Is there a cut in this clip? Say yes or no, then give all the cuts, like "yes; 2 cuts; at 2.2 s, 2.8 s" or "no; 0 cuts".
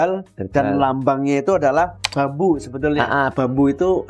yes; 2 cuts; at 2.0 s, 3.3 s